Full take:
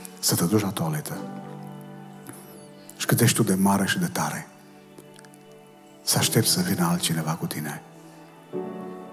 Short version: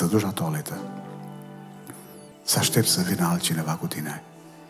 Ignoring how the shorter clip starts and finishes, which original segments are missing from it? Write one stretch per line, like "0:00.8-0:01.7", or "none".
0:02.7-0:05.9